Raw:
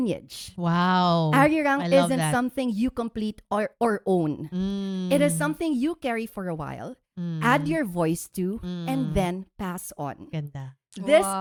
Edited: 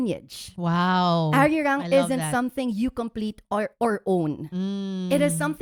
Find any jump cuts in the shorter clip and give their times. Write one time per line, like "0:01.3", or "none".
none